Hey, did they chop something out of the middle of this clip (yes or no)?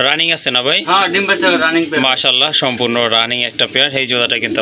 no